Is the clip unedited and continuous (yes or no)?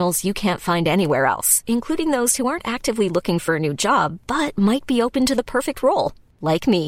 yes